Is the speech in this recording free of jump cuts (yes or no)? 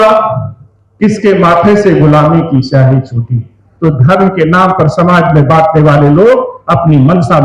no